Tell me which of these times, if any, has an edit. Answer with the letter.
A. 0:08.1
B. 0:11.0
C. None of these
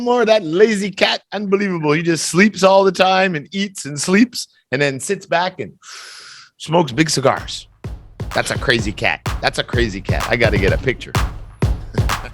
B